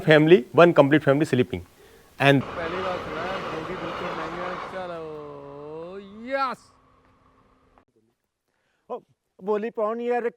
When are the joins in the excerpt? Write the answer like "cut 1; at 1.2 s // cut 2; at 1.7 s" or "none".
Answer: cut 1; at 2.4 s // cut 2; at 7.9 s